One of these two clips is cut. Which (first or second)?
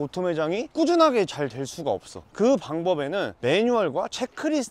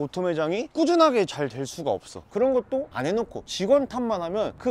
second